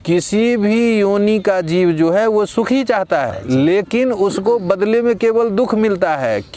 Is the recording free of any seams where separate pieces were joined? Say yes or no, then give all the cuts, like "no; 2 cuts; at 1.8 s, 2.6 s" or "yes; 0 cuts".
no; 1 cut; at 3.3 s